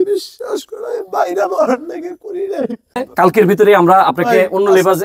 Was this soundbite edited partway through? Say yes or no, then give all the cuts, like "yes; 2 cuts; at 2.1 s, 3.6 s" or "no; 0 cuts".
yes; 1 cut; at 2.8 s